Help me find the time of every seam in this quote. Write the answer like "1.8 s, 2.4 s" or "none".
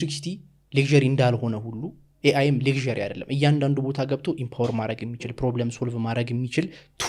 none